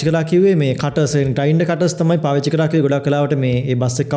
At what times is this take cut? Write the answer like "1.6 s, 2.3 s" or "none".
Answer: none